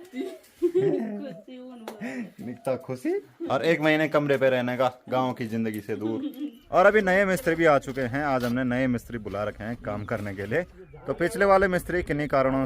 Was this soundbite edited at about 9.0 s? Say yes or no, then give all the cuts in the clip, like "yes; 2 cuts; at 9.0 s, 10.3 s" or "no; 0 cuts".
no; 3 cuts; at 3.3 s, 6.5 s, 10.8 s